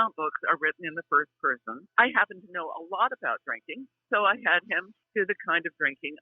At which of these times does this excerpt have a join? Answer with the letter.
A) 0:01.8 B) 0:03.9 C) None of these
A